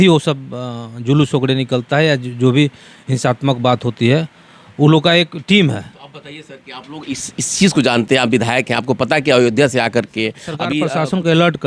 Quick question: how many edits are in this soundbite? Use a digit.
1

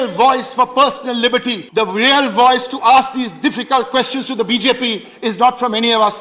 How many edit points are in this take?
1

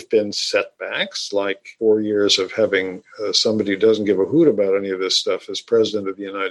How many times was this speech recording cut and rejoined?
1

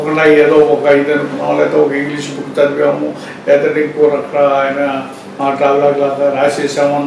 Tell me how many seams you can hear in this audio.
0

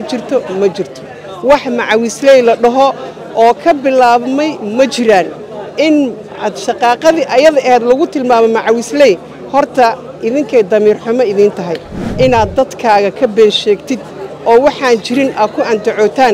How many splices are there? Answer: 1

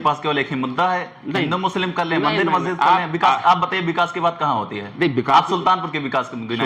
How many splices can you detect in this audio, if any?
0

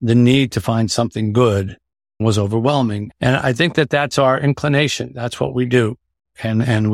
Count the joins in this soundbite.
2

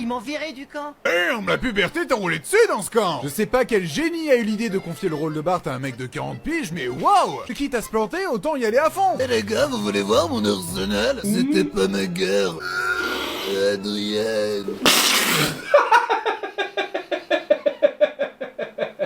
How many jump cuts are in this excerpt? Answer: 4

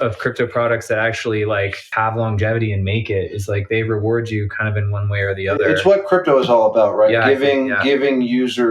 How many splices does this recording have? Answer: 1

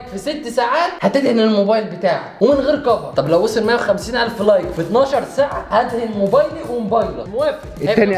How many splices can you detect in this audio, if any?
1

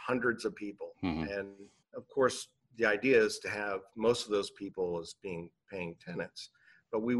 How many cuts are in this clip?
1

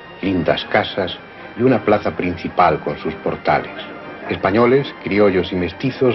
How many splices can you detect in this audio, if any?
1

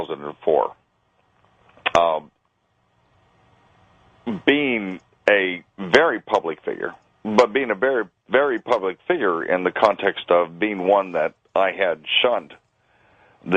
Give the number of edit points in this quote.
1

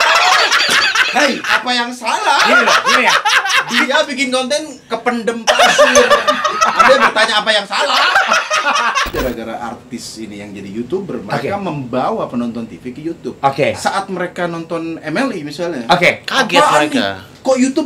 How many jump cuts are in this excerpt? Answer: 2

